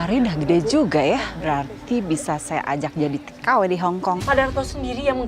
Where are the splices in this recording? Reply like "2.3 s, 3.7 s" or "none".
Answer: 1.3 s, 4.2 s